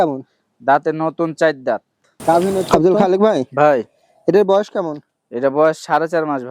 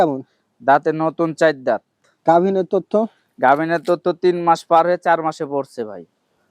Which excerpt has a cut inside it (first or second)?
first